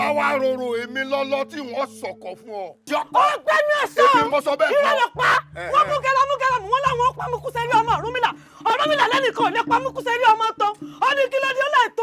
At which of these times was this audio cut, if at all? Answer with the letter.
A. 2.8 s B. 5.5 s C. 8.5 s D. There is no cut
A